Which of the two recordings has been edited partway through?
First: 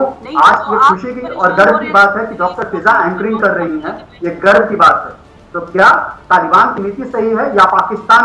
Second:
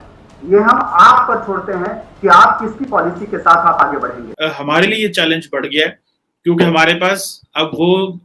second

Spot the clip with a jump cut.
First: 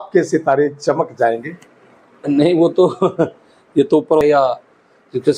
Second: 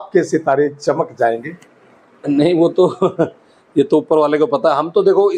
first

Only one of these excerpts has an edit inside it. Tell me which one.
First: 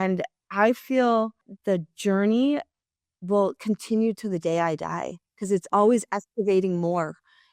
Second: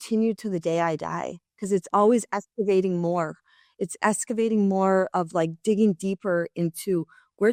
first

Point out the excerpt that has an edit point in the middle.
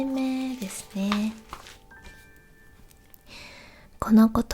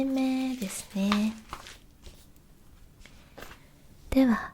first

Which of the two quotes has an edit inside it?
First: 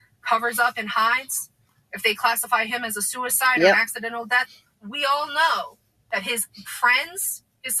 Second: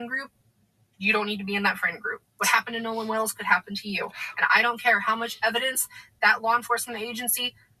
first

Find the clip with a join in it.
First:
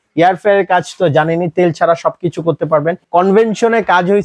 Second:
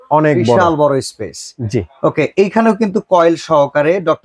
first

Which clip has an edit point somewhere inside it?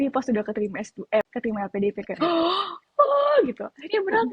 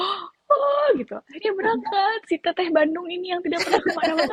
first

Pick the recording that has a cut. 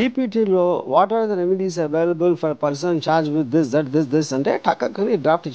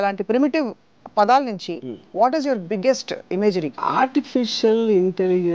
second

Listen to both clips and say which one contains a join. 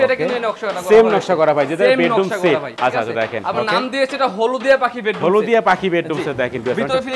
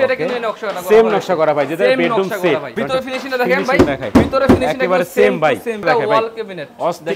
second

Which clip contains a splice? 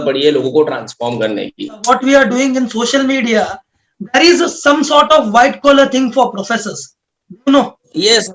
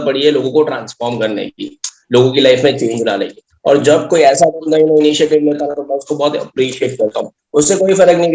first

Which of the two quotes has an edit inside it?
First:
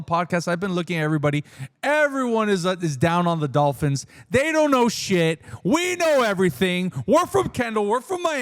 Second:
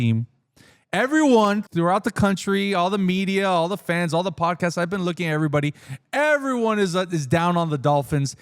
second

